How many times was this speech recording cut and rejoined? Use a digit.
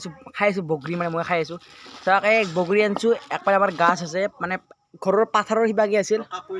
0